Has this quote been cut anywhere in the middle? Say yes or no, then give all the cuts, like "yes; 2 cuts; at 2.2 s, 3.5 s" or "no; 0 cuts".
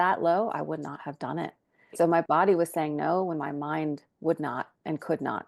yes; 1 cut; at 1.9 s